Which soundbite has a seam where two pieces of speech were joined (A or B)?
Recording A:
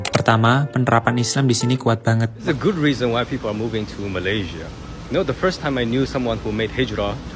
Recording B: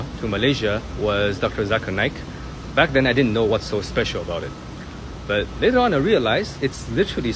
A